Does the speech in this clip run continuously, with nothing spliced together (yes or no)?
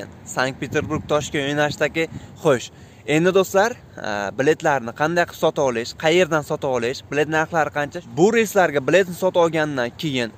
no